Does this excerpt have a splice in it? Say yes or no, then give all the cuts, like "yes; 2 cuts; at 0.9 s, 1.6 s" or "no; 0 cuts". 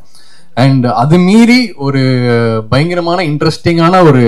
no; 0 cuts